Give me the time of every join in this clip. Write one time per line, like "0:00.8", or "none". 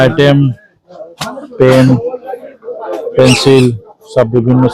none